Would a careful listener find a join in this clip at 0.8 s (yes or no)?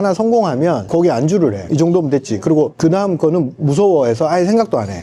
yes